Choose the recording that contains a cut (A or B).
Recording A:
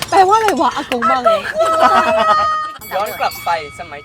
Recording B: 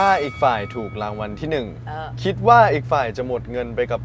A